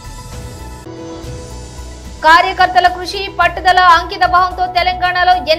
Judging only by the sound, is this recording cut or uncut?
uncut